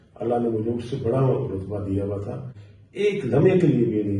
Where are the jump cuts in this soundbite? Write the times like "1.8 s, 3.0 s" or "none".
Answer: 2.6 s

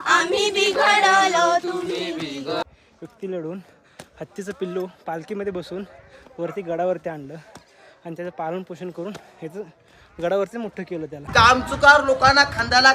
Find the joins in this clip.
2.6 s, 11.2 s

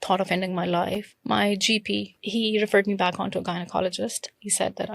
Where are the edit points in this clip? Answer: 1.1 s, 2.3 s

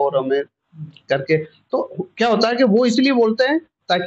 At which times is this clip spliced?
none

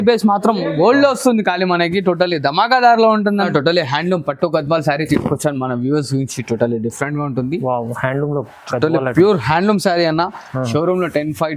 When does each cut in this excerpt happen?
3.5 s

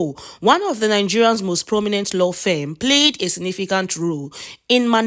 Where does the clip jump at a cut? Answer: none

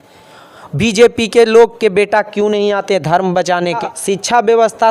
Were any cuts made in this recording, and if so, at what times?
3.8 s

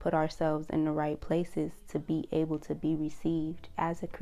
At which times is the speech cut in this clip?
none

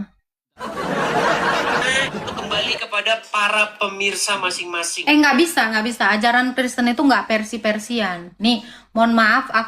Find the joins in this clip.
1.8 s

